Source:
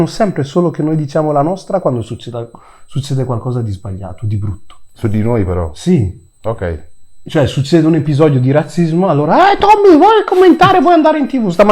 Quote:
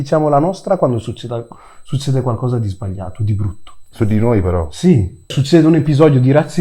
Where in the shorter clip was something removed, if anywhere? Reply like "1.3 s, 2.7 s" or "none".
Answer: 5.3 s